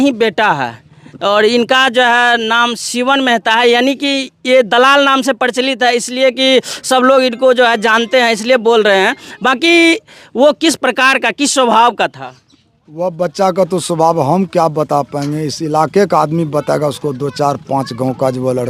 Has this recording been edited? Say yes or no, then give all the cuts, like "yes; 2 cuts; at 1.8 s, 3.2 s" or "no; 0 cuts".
no; 0 cuts